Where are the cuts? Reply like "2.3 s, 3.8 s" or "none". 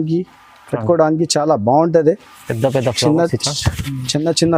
none